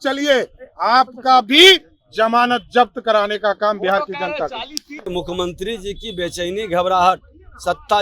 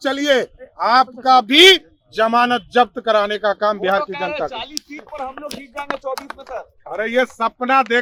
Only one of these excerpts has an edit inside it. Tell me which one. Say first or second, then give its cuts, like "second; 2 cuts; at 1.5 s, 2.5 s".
first; 1 cut; at 5.1 s